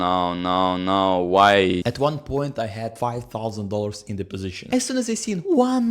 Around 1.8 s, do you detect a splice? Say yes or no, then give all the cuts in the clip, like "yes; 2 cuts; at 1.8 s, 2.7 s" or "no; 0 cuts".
yes; 2 cuts; at 1.8 s, 4.7 s